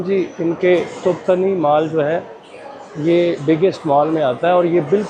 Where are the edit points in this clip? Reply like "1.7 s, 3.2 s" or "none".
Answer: none